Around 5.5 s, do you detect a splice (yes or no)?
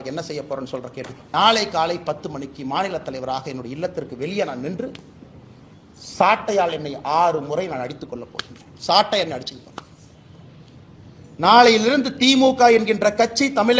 no